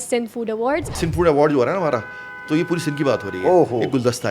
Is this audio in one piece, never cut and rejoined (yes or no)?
no